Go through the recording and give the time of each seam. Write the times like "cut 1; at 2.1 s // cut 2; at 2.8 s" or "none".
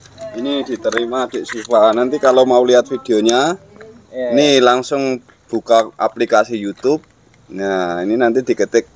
none